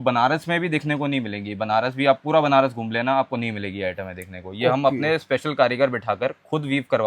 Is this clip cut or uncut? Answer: uncut